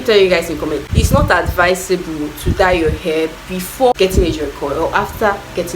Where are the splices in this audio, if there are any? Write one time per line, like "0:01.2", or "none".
0:00.9
0:03.9